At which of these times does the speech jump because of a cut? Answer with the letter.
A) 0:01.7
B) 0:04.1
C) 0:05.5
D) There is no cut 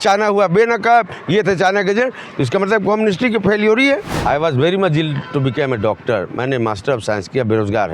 B